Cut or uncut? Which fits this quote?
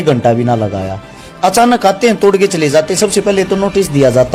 uncut